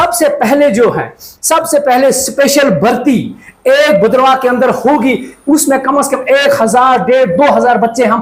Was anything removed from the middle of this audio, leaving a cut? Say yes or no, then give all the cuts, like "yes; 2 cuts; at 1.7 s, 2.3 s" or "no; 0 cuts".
no; 0 cuts